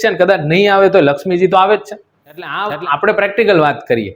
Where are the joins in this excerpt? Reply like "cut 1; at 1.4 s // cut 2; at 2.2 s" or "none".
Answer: cut 1; at 2.6 s